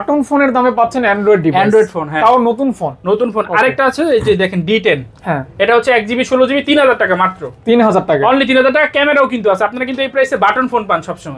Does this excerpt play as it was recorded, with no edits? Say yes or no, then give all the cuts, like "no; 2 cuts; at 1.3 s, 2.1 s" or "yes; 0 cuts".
yes; 0 cuts